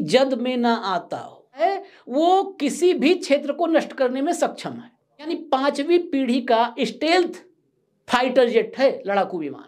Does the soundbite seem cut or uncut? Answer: cut